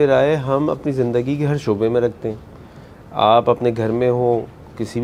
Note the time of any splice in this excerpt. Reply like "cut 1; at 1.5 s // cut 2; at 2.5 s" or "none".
none